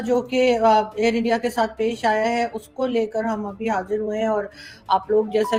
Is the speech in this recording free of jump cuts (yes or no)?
yes